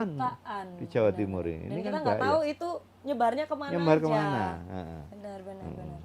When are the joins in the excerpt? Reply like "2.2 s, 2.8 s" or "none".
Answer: none